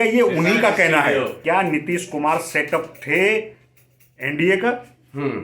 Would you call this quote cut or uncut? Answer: cut